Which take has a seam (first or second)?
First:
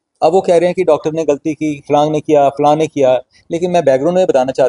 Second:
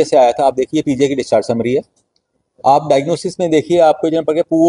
first